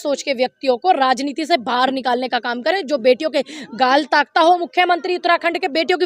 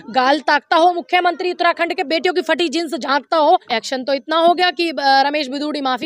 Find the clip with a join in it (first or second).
second